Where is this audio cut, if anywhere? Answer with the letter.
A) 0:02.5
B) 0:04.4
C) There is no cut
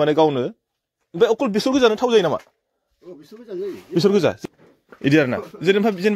B